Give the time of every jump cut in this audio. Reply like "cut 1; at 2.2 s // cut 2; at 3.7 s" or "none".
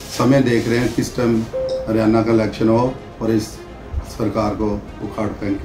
none